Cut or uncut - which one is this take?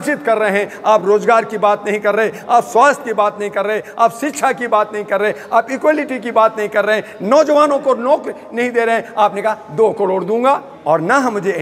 cut